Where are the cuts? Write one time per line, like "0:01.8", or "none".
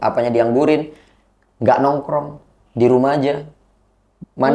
none